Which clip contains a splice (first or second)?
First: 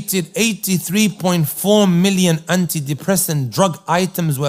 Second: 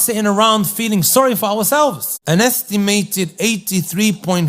second